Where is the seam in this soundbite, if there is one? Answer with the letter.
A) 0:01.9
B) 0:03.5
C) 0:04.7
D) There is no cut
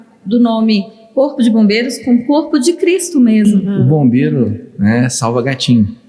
B